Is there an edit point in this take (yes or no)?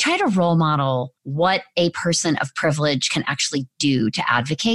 yes